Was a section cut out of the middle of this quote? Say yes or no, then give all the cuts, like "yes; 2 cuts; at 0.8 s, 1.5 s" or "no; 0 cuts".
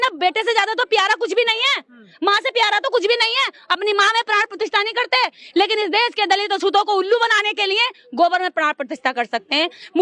no; 0 cuts